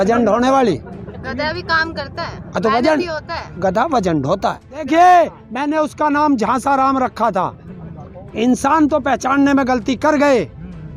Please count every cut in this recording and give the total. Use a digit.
1